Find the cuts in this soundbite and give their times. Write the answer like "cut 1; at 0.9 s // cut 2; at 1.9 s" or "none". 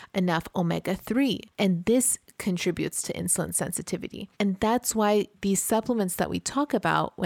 cut 1; at 1.5 s // cut 2; at 4.2 s // cut 3; at 5.3 s